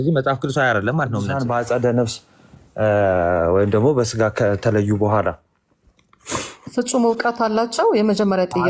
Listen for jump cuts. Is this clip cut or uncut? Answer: cut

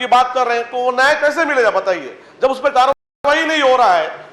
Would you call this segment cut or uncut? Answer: uncut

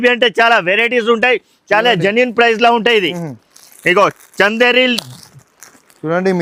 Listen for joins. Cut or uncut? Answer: uncut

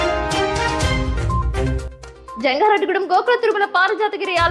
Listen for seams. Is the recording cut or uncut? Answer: uncut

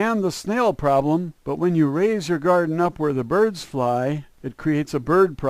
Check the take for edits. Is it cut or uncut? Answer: cut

